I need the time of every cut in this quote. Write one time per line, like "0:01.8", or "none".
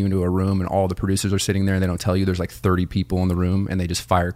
none